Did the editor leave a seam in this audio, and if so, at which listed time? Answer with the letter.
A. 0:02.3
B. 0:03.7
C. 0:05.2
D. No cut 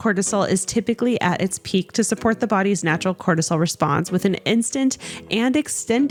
D